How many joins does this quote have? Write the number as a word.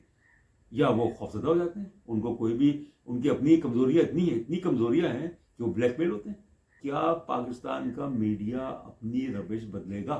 one